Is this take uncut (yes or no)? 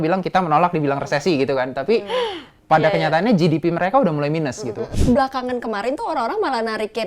no